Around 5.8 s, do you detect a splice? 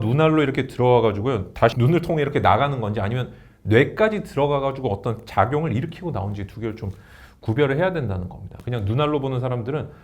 no; 2 cuts; at 1.7 s, 8.5 s

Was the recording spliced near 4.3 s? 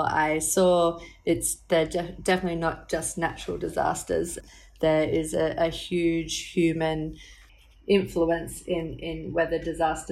yes; 2 cuts; at 4.3 s, 7.4 s

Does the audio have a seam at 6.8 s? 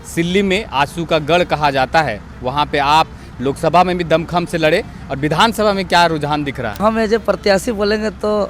yes; 1 cut; at 6.8 s

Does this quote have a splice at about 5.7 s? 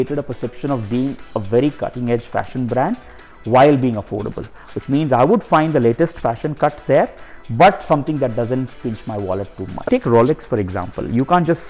no; 1 cut; at 9.9 s

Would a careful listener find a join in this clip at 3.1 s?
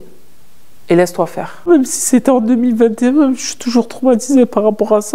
no; 1 cut; at 1.7 s

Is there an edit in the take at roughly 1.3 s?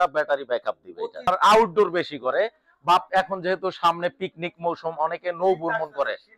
yes; 1 cut; at 1.3 s

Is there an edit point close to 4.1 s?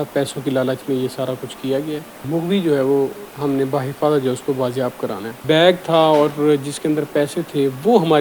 no; 2 cuts; at 2.2 s, 5.3 s

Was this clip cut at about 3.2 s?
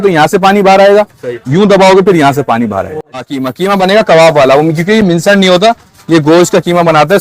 yes; 1 cut; at 3.2 s

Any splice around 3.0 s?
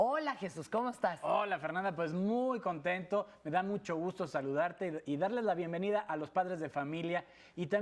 yes; 1 cut; at 3.0 s

